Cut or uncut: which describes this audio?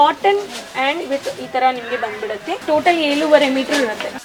uncut